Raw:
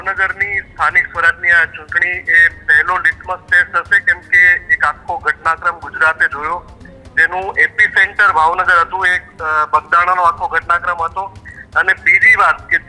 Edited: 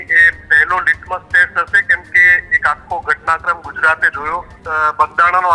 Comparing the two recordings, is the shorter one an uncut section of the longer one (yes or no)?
no